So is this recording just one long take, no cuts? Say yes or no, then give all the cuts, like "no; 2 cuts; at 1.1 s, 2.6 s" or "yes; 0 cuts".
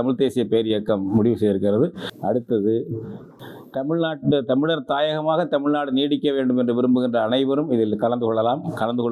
yes; 0 cuts